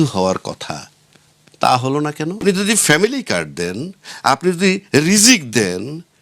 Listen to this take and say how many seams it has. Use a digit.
1